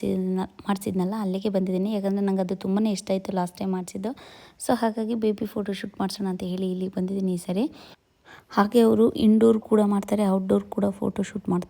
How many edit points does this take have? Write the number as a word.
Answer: zero